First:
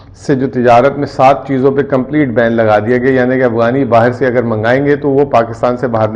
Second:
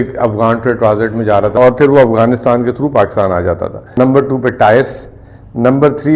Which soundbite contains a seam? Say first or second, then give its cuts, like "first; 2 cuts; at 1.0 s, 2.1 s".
second; 2 cuts; at 1.6 s, 3.8 s